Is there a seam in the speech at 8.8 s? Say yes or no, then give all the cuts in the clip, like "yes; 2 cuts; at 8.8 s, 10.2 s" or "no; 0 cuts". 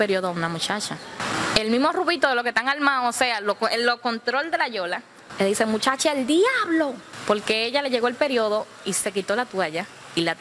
no; 3 cuts; at 1.3 s, 5.2 s, 7.1 s